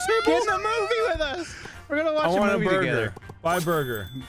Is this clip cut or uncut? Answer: uncut